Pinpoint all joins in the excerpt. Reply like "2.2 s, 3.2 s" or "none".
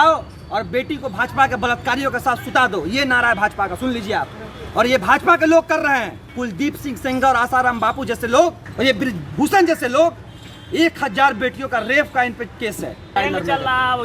6.2 s, 8.6 s, 13.2 s